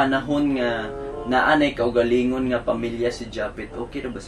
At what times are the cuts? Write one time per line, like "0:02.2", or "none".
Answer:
none